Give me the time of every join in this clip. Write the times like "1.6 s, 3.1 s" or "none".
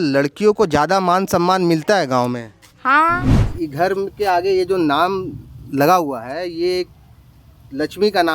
3.3 s

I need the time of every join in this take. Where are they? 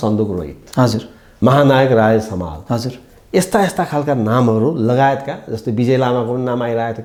none

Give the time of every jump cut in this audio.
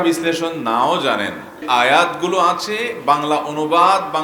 1.6 s

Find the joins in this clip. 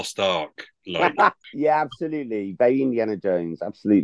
1.5 s

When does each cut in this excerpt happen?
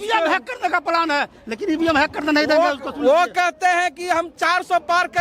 none

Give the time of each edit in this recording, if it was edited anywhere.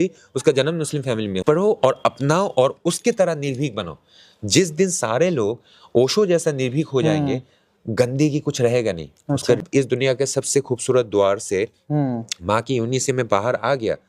1.4 s, 9.6 s

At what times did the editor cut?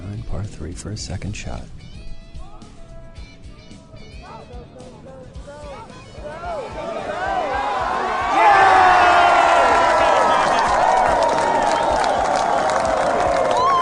2.0 s

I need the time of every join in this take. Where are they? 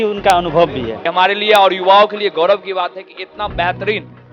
0.9 s

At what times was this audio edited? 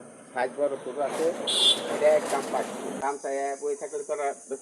3.0 s

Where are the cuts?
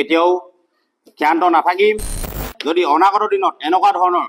2.4 s

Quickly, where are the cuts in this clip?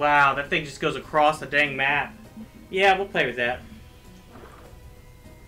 none

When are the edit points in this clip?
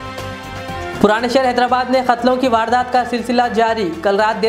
0.9 s

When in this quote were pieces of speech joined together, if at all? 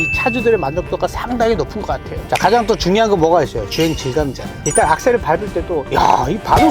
2.2 s

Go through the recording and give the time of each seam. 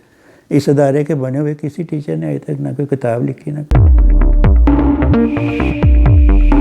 3.6 s

